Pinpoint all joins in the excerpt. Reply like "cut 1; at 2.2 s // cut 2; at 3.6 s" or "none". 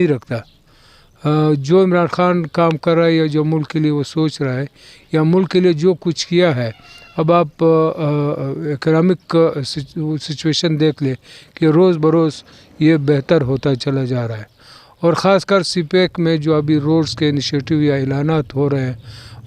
none